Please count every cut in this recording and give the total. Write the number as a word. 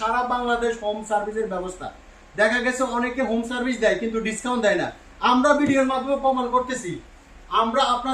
zero